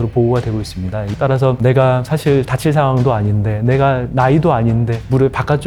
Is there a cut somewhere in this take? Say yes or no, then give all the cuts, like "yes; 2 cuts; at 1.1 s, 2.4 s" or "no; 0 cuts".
yes; 1 cut; at 1.1 s